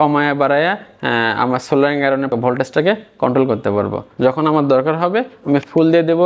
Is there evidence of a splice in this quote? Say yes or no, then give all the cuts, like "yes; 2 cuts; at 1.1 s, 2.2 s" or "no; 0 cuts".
yes; 2 cuts; at 2.3 s, 4.1 s